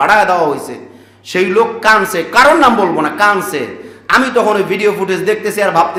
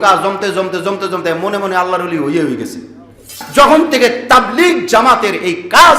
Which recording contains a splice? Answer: second; 1 cut; at 3.4 s

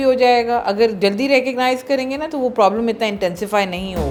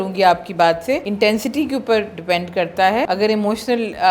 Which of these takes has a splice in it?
second; 2 cuts; at 1.1 s, 3.1 s

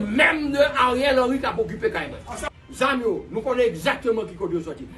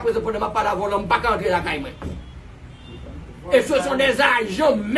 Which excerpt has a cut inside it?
first; 1 cut; at 2.4 s

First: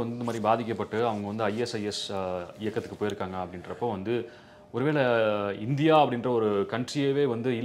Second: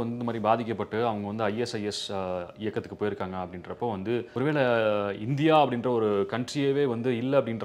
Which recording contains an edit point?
second; 1 cut; at 4.3 s

